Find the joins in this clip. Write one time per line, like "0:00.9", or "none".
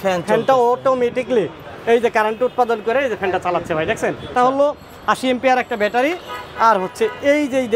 0:04.3